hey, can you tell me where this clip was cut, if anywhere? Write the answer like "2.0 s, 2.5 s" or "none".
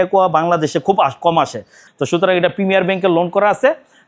1.8 s

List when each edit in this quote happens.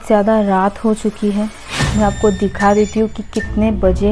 none

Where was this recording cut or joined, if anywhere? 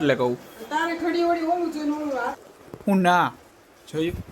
2.4 s

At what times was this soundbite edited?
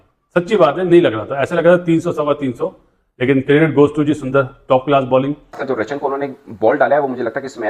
5.6 s

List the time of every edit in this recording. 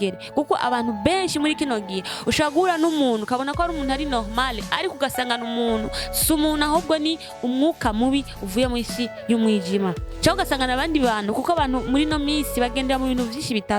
none

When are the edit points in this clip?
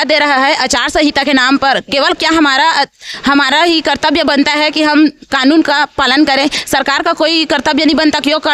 none

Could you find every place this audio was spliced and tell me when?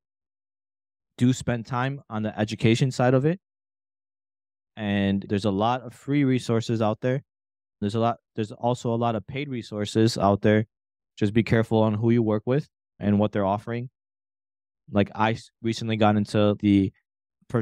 none

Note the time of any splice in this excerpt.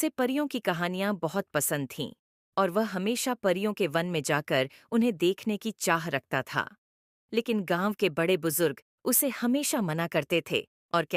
none

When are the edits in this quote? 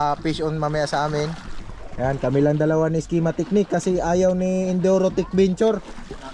none

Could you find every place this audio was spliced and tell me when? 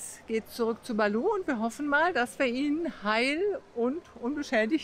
none

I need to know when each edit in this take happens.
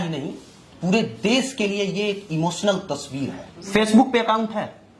3.6 s

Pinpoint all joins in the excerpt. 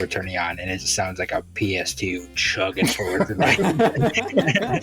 none

